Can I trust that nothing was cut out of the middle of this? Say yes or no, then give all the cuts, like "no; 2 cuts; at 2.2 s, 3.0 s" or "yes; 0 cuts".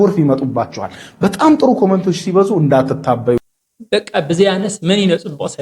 no; 1 cut; at 3.4 s